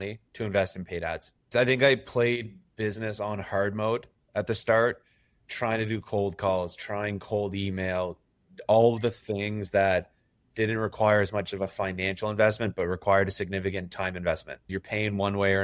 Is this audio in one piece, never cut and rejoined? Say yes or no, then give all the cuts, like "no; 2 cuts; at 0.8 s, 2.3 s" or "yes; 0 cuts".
no; 2 cuts; at 1.3 s, 14.8 s